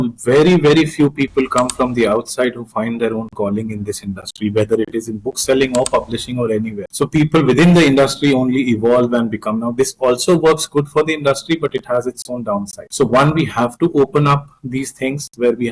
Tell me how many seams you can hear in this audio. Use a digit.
2